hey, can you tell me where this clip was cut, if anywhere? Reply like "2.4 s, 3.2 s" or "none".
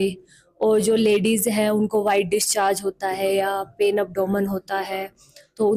none